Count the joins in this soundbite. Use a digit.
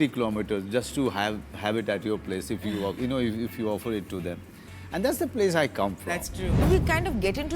1